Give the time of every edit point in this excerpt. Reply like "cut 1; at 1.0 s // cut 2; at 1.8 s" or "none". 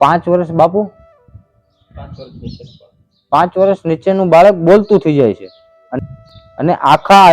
cut 1; at 6.0 s